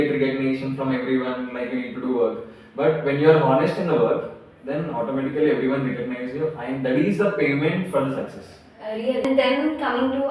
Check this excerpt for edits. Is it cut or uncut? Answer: cut